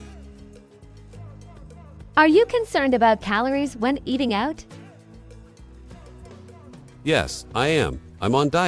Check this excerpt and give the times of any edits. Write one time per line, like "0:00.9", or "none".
0:02.1
0:04.6
0:07.0